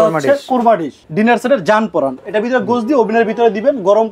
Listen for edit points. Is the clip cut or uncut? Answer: cut